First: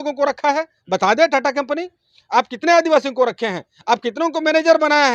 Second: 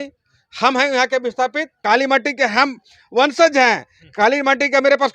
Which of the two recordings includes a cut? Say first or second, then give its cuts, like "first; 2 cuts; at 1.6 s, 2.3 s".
second; 1 cut; at 1.7 s